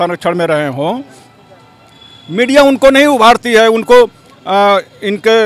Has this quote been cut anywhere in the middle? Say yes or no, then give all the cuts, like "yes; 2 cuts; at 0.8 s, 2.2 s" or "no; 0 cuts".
no; 0 cuts